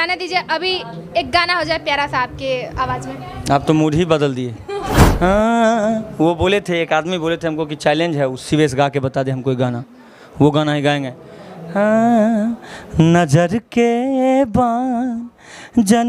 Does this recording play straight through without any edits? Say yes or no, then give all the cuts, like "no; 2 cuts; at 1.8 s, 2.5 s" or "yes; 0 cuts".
no; 1 cut; at 5.1 s